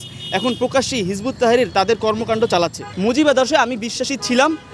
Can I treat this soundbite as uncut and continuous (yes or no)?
no